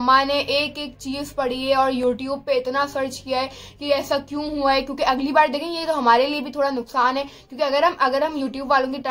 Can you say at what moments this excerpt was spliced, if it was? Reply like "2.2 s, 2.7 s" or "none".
none